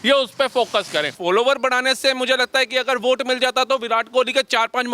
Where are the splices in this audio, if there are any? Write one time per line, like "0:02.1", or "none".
0:01.2

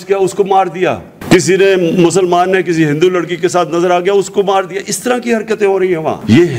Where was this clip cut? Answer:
none

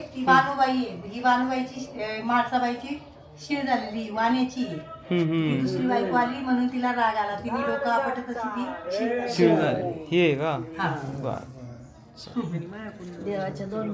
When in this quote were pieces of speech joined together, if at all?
none

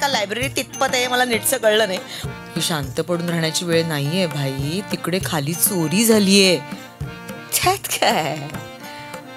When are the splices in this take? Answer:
0:02.1

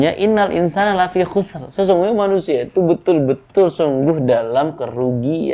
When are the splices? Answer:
none

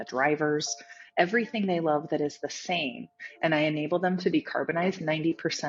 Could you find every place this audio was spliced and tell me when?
none

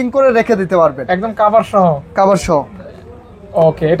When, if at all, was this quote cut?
none

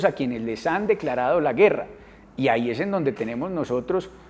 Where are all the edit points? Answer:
none

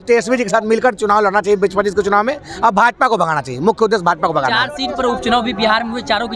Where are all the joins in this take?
none

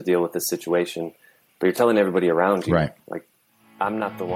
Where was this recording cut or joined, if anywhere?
none

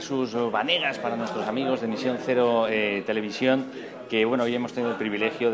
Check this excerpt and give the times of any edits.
0:02.3

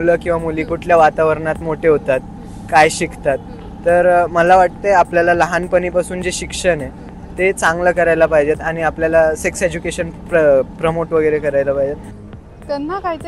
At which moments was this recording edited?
0:12.1

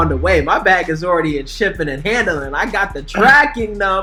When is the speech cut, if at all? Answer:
none

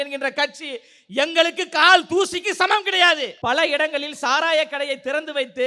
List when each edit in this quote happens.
0:03.3

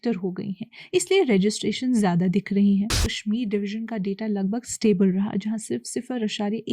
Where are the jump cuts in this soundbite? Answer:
0:03.1

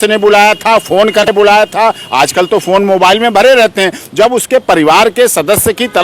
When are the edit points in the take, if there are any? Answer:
0:01.3

